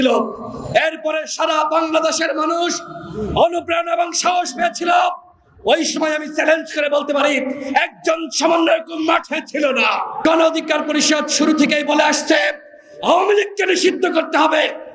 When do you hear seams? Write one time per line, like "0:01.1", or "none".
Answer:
0:10.2